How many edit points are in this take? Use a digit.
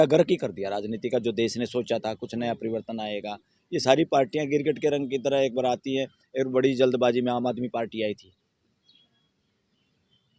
0